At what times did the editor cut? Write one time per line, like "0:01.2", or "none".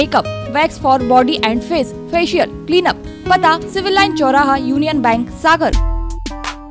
0:05.7